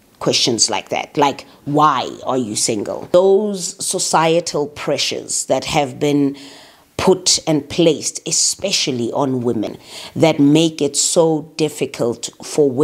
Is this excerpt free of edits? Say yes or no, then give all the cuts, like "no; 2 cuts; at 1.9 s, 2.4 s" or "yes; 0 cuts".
no; 2 cuts; at 3.0 s, 9.9 s